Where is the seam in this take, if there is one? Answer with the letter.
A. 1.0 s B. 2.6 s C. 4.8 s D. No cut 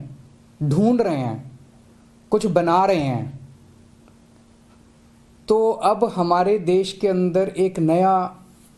A